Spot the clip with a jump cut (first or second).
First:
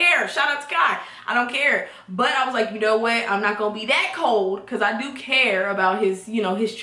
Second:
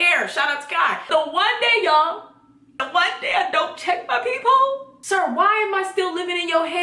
second